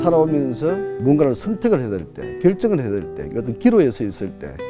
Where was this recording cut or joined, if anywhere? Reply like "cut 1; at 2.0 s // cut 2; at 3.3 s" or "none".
cut 1; at 0.9 s